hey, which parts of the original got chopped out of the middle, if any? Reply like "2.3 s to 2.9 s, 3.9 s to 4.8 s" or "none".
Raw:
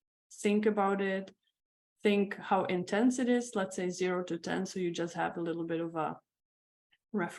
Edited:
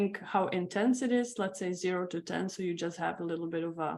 none